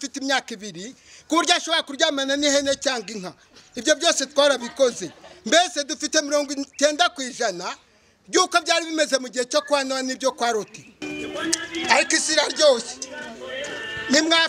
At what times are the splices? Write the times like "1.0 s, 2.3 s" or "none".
11.1 s